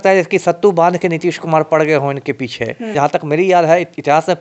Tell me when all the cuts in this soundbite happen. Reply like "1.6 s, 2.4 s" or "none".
2.9 s